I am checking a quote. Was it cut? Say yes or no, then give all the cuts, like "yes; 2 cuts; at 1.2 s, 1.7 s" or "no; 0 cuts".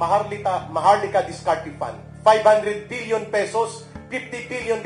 yes; 1 cut; at 2.1 s